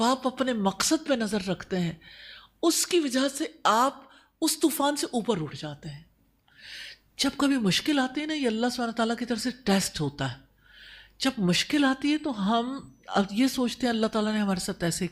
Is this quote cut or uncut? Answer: cut